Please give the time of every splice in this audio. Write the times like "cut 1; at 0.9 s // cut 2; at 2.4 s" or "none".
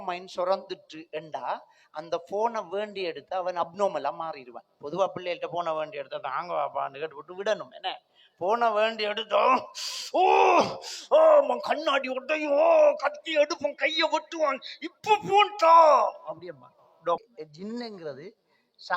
cut 1; at 17.2 s